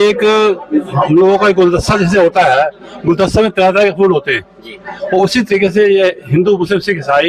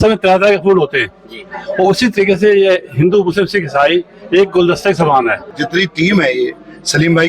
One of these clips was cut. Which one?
second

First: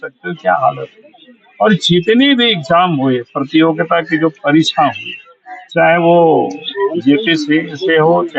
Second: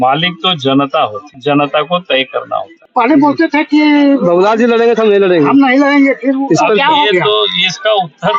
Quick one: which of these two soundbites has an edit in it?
second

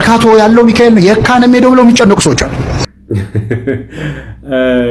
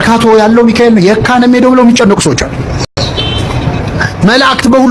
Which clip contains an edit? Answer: first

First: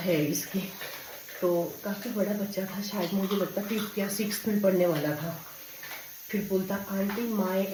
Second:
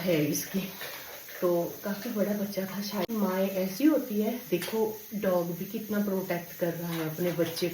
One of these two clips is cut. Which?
second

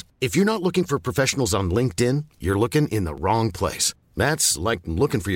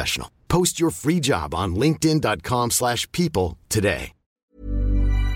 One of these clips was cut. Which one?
second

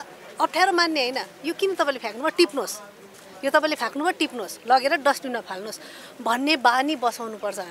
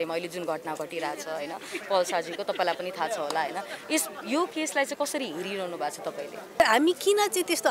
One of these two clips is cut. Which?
second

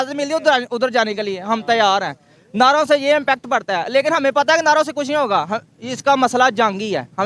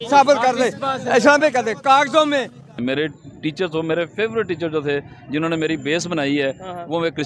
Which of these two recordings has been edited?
second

